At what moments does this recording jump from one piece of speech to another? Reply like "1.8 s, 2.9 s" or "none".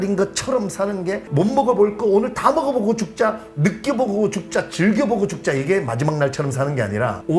1.2 s